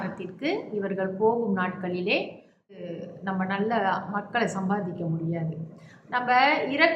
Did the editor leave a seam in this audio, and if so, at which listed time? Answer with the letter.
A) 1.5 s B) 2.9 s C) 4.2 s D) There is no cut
B